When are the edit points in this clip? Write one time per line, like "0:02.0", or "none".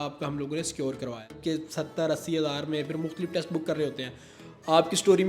0:01.4